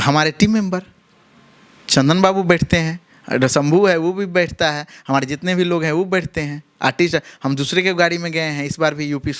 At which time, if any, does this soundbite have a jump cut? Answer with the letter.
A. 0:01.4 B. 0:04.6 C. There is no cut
C